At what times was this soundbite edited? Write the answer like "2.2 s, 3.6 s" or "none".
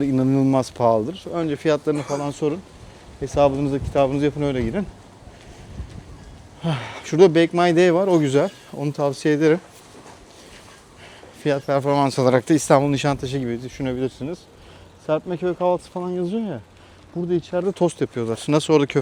none